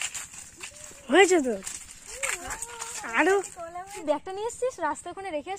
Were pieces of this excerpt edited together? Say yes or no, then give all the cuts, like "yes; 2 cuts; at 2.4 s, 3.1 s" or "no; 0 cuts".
yes; 1 cut; at 3.8 s